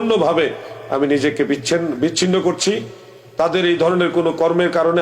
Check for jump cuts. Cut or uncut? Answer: uncut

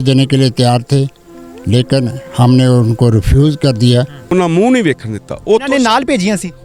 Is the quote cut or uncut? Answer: cut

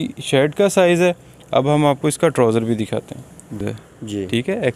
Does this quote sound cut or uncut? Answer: uncut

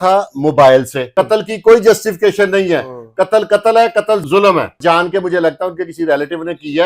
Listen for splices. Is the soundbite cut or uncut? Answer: cut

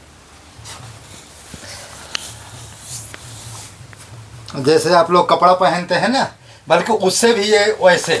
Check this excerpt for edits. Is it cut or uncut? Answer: uncut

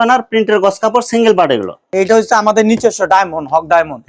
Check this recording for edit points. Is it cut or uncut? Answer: cut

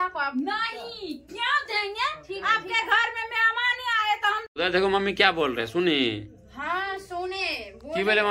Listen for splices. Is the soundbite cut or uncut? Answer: cut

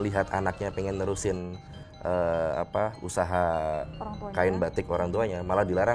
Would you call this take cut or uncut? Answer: uncut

